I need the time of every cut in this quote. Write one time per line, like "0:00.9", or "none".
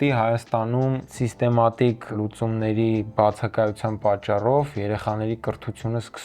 0:01.1
0:02.1